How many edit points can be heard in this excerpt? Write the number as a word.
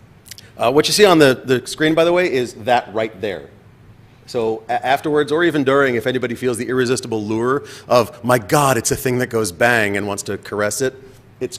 one